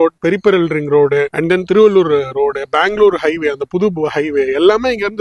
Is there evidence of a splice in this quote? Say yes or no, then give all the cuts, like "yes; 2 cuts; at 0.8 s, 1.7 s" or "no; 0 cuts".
no; 0 cuts